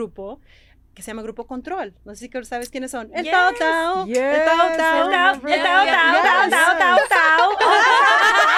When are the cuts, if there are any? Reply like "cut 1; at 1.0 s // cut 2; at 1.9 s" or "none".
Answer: none